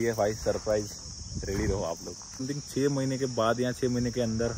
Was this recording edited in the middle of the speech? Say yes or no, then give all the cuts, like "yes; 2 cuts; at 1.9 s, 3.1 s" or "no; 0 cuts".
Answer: yes; 1 cut; at 2.4 s